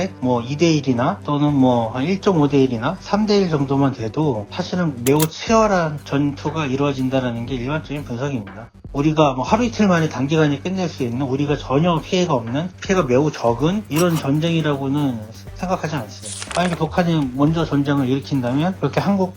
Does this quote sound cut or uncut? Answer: cut